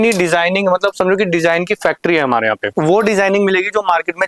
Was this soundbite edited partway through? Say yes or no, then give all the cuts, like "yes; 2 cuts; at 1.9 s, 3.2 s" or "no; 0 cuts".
yes; 1 cut; at 2.7 s